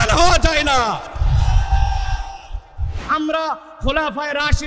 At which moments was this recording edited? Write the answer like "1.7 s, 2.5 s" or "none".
3.0 s